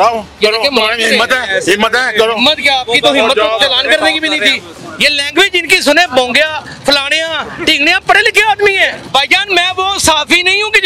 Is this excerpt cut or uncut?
cut